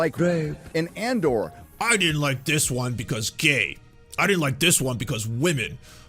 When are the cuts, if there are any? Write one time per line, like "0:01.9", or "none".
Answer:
0:01.7